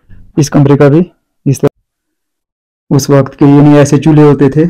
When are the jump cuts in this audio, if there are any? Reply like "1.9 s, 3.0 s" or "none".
1.7 s